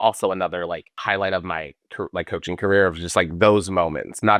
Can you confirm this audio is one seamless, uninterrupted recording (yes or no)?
no